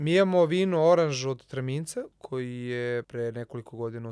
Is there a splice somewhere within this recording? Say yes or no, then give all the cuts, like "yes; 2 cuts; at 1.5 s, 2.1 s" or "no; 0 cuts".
yes; 2 cuts; at 2.2 s, 3.1 s